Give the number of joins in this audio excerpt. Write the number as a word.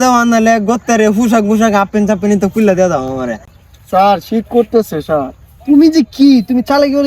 one